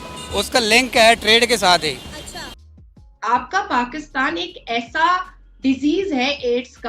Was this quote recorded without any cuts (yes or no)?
no